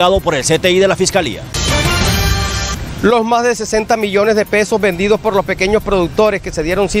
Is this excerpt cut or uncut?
cut